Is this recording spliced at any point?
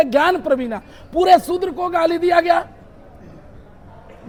no; 0 cuts

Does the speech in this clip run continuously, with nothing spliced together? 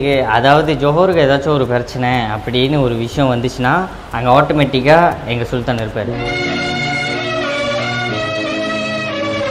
yes; 0 cuts

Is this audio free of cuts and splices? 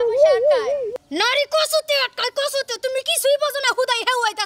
no; 1 cut; at 1.0 s

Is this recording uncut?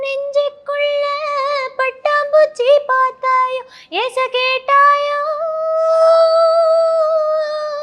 yes; 0 cuts

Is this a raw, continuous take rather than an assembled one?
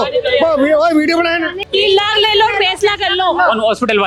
no; 1 cut; at 1.6 s

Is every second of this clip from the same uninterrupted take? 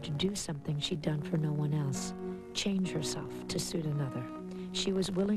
yes; 0 cuts

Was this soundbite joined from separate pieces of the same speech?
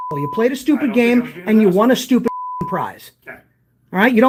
no; 0 cuts

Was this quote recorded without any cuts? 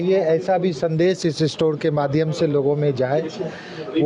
yes; 0 cuts

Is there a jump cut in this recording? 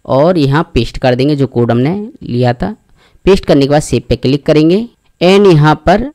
yes; 1 cut; at 5.0 s

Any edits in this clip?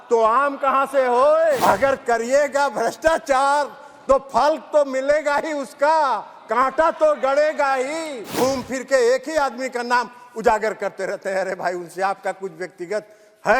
yes; 2 cuts; at 1.6 s, 8.3 s

